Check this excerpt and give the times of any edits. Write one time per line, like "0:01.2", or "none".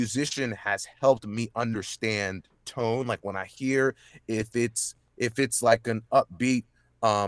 none